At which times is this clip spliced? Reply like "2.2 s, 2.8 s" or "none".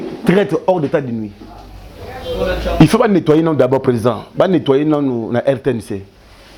none